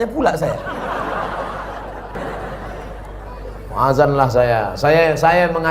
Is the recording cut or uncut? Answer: cut